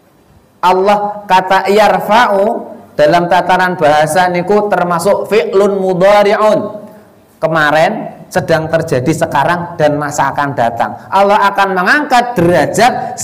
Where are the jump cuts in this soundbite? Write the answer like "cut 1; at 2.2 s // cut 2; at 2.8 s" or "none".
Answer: none